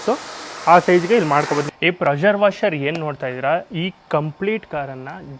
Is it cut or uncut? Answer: cut